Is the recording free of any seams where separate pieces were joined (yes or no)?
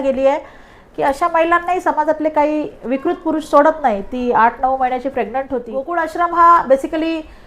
no